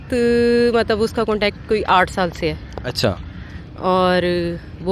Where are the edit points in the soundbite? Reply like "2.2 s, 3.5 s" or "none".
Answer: none